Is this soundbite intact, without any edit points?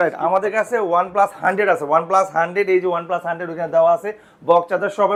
yes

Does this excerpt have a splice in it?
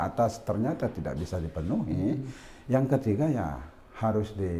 no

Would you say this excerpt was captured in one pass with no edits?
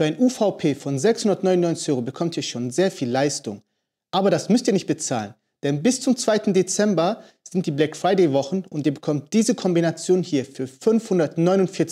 yes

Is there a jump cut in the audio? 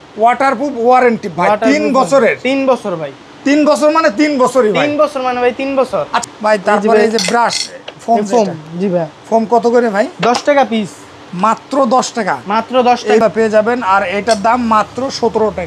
yes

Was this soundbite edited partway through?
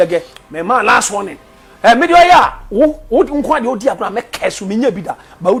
no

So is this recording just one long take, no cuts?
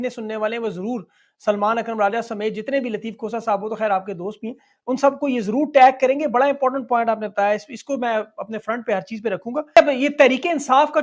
no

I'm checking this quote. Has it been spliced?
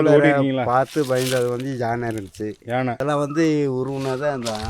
yes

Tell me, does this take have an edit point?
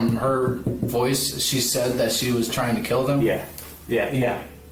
no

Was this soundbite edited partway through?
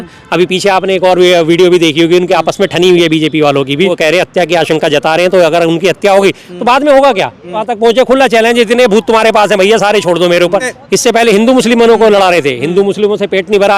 yes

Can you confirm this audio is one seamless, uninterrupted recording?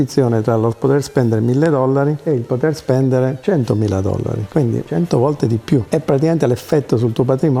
yes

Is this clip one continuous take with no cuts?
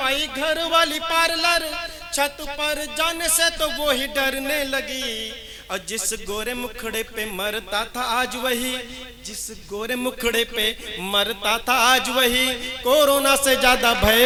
yes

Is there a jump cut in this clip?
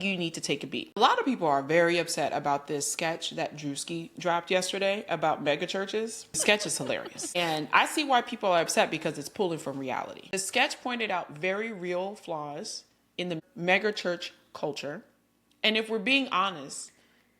yes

